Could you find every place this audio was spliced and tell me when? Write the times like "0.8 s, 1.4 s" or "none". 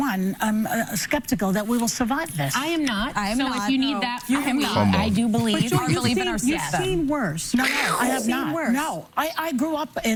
none